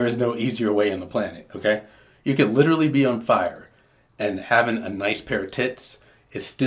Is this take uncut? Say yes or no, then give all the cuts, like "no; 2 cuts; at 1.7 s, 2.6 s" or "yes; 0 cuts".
yes; 0 cuts